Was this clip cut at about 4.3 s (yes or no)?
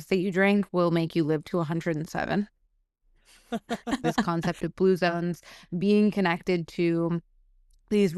yes